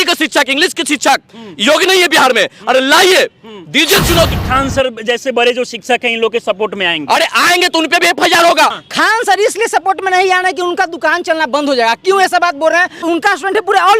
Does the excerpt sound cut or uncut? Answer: cut